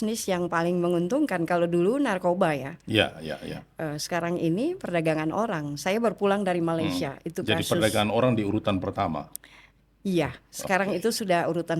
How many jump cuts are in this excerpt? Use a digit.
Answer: 0